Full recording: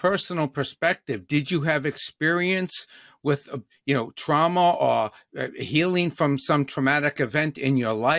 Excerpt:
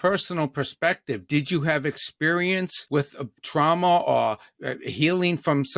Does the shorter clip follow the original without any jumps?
no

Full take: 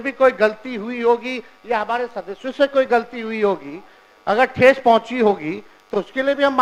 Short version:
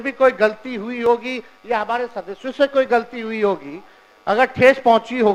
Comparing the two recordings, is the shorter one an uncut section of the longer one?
yes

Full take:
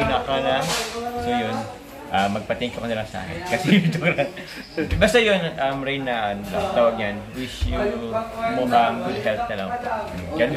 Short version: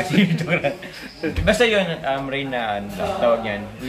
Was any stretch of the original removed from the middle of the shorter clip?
no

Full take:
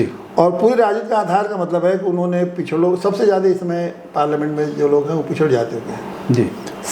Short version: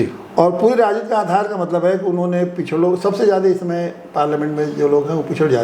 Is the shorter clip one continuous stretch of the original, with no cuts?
yes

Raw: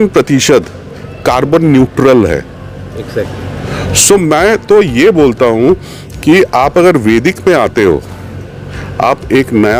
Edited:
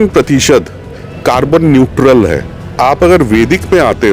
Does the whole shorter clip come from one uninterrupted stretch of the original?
no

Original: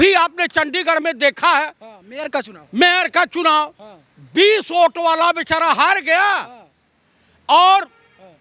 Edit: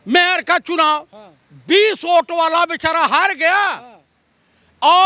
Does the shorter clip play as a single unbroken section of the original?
yes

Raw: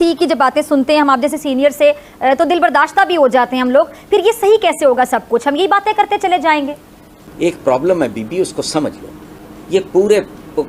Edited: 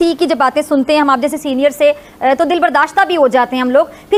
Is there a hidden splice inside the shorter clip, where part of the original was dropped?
no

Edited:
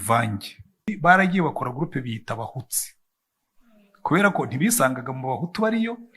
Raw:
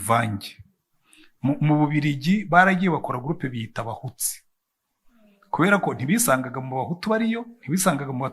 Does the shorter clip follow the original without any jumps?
no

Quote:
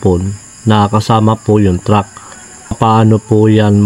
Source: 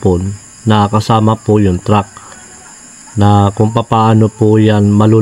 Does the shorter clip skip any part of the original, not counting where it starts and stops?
yes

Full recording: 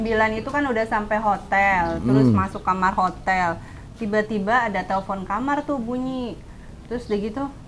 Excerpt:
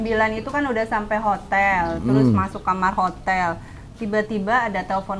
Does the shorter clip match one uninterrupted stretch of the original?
yes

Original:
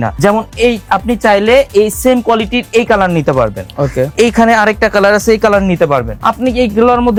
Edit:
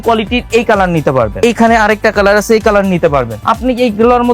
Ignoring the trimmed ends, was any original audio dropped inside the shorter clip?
yes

